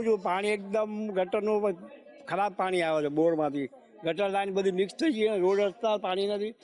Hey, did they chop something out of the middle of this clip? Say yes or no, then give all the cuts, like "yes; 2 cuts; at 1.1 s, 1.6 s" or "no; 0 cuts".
no; 0 cuts